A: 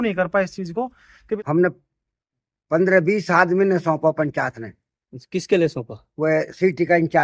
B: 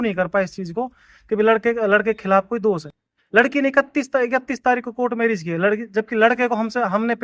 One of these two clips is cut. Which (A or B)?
A